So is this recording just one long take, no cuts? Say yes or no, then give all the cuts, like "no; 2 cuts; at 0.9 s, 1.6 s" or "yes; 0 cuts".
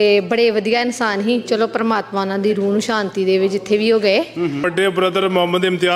no; 1 cut; at 4.7 s